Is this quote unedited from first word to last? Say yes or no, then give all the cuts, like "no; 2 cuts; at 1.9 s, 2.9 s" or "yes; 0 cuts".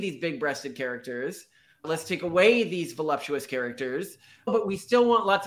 no; 1 cut; at 4.5 s